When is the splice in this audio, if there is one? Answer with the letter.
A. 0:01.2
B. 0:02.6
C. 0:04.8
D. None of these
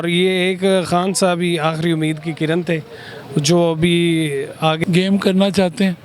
C